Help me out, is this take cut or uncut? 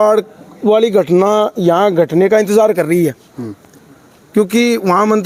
uncut